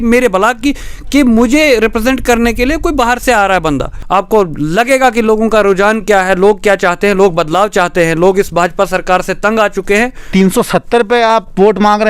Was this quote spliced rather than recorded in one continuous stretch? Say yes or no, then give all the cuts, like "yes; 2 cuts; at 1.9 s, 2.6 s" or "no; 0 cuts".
yes; 2 cuts; at 3.9 s, 10.3 s